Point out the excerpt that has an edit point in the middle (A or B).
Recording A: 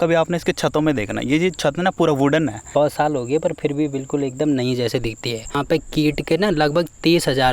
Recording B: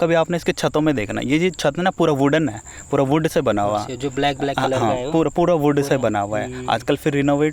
A